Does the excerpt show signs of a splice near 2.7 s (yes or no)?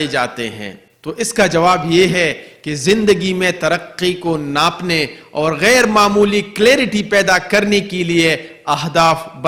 no